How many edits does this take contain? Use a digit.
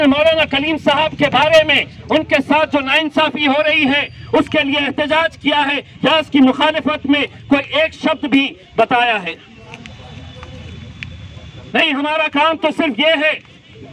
0